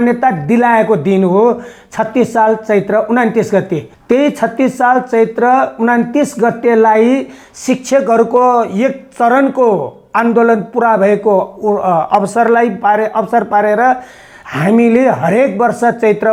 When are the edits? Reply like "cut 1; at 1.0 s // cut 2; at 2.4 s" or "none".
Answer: none